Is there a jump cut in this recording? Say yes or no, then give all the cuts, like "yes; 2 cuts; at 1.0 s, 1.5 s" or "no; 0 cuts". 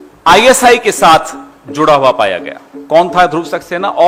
no; 0 cuts